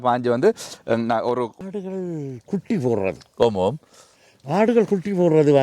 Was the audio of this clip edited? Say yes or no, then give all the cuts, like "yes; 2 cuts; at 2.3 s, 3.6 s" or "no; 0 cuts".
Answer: yes; 1 cut; at 1.5 s